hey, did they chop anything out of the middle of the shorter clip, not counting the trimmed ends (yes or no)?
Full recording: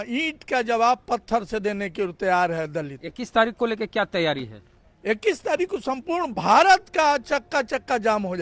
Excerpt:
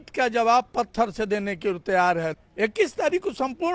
yes